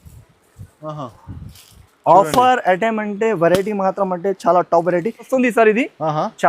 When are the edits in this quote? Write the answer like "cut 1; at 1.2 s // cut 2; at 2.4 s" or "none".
cut 1; at 5.3 s